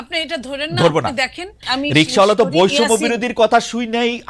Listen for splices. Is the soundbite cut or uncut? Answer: cut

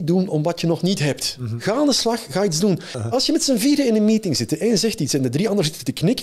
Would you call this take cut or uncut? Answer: cut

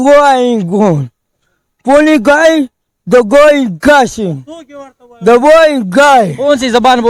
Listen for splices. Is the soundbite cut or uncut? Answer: uncut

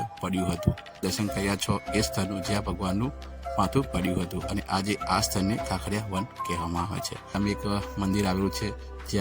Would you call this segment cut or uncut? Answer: cut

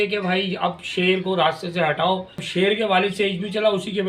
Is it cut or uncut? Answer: cut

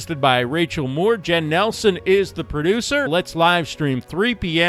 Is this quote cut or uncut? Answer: cut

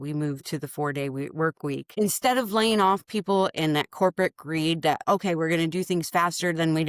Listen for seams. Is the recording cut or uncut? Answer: cut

